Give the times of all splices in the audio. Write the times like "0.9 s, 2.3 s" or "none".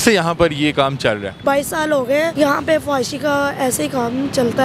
1.4 s, 2.3 s